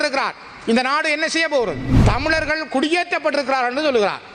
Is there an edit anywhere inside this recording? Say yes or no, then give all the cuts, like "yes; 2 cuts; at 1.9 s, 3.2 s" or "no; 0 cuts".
yes; 1 cut; at 1.9 s